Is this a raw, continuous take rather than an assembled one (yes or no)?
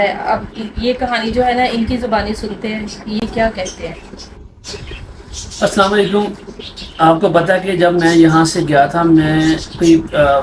yes